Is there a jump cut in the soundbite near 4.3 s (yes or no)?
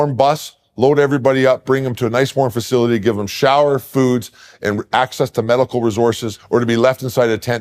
no